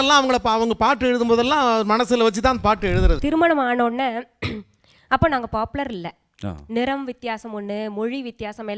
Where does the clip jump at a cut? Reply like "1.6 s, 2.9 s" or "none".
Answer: 3.2 s

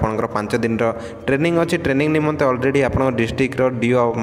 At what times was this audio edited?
none

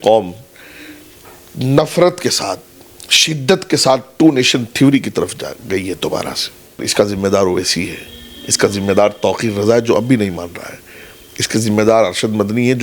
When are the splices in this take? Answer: 6.8 s

